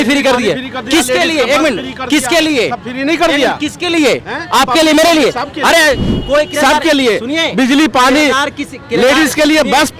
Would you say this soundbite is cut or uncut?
uncut